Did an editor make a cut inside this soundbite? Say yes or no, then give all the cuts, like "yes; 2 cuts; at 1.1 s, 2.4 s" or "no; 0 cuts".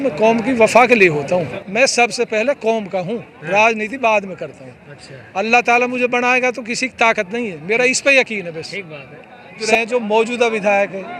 yes; 2 cuts; at 1.6 s, 9.7 s